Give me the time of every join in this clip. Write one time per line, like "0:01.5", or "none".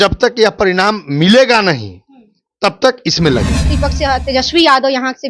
0:03.6